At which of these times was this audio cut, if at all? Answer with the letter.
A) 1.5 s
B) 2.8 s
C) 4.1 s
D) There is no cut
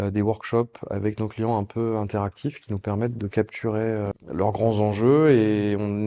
C